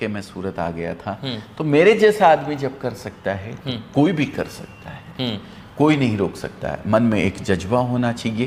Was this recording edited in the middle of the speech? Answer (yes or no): no